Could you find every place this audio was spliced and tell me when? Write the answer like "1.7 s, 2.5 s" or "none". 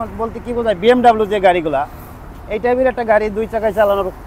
none